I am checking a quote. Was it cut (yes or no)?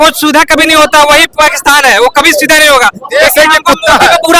no